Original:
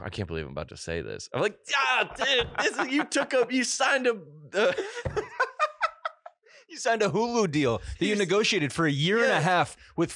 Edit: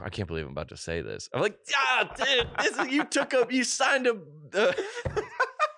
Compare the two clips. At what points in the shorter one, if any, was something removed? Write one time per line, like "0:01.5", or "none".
none